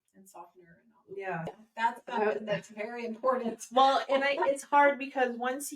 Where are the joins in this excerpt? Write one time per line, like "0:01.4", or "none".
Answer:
0:01.6